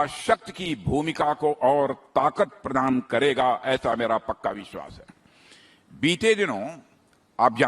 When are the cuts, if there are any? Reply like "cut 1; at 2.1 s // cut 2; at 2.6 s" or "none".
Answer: none